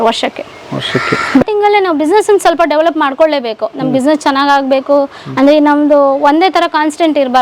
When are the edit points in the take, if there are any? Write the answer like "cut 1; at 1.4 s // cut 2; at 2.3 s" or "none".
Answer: cut 1; at 1.4 s